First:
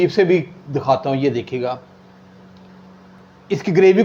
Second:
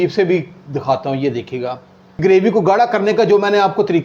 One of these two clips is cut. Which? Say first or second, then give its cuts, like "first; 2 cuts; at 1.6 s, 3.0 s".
second; 1 cut; at 2.2 s